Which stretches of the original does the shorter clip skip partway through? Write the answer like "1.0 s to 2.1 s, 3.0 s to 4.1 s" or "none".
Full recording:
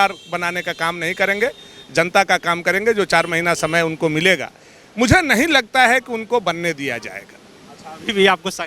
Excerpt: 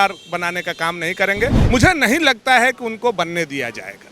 1.6 s to 4.9 s